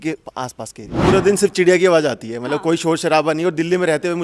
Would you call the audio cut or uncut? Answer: cut